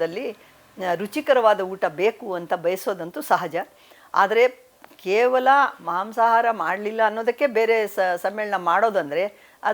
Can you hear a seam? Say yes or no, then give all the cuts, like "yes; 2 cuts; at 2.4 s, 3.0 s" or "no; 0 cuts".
no; 0 cuts